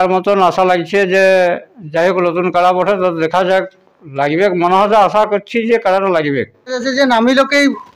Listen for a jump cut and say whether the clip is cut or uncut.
cut